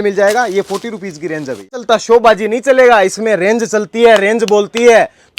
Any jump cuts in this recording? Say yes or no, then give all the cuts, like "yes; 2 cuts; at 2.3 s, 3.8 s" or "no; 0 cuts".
yes; 1 cut; at 1.8 s